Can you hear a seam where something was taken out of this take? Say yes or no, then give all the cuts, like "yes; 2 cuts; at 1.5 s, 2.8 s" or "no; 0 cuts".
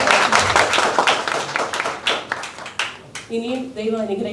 no; 0 cuts